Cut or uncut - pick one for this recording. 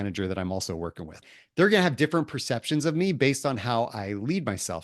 cut